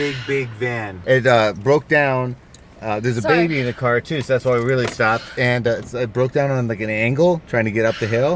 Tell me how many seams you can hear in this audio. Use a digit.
1